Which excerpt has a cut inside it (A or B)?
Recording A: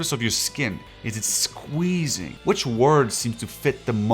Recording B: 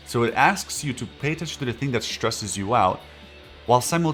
A